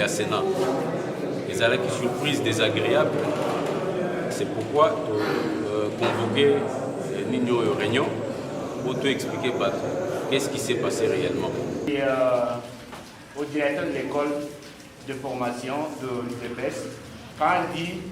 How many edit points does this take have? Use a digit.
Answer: 1